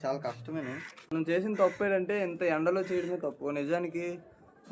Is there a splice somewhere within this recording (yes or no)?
yes